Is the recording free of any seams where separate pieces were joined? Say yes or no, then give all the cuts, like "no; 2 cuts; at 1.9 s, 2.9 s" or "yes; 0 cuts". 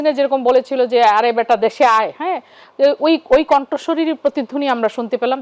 yes; 0 cuts